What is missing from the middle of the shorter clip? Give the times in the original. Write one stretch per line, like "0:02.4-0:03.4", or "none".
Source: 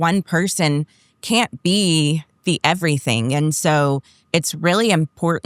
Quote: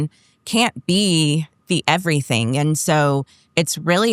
none